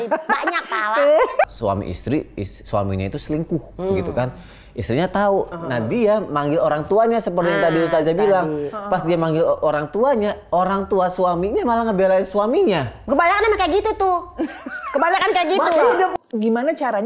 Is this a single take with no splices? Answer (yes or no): no